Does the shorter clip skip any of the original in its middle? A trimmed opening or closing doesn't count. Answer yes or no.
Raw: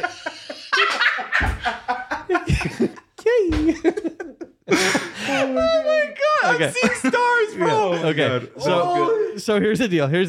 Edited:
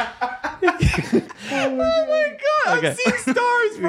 yes